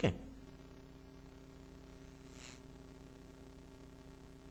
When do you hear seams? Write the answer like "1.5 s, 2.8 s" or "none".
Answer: none